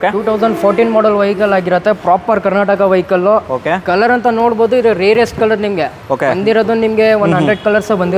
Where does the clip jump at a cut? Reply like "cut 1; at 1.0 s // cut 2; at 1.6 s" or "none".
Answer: none